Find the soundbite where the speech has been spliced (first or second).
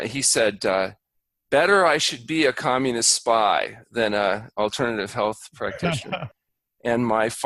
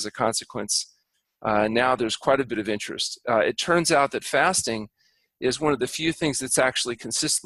first